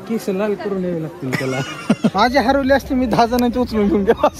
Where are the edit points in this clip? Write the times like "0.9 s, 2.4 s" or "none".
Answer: 2.1 s